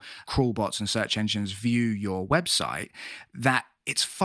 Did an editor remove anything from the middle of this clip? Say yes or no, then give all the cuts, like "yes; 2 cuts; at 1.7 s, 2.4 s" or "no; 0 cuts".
no; 0 cuts